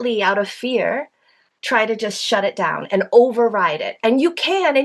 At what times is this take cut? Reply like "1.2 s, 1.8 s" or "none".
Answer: none